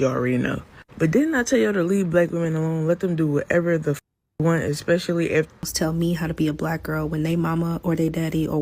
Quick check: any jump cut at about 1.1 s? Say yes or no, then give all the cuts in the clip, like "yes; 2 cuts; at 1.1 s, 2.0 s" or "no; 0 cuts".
no; 1 cut; at 5.7 s